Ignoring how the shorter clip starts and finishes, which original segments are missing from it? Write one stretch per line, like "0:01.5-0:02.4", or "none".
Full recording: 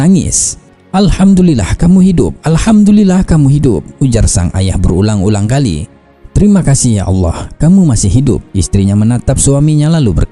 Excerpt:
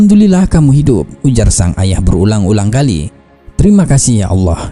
none